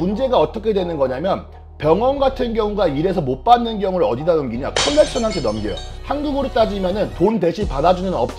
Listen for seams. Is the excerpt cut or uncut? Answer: uncut